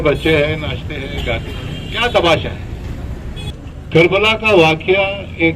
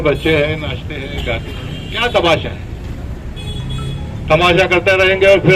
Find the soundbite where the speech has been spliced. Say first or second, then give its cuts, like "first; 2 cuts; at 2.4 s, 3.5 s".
first; 1 cut; at 3.5 s